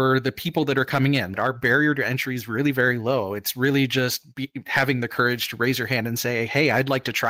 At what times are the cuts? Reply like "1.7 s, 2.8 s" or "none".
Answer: 1.4 s